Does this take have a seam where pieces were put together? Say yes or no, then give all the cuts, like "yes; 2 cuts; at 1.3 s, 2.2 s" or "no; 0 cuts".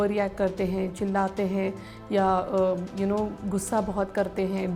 no; 0 cuts